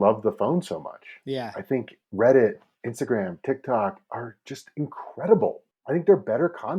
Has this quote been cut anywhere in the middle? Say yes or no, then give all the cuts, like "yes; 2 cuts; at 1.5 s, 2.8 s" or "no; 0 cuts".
no; 0 cuts